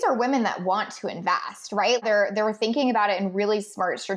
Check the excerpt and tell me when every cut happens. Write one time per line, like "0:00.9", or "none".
0:02.0